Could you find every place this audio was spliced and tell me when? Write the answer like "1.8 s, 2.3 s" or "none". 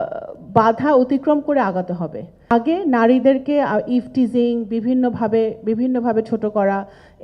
2.3 s